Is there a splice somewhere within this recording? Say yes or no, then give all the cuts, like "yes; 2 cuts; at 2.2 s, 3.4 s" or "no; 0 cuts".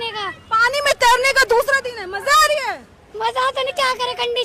no; 0 cuts